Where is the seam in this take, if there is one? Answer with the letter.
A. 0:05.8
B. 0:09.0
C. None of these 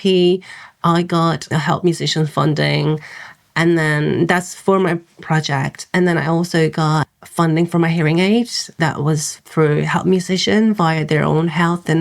B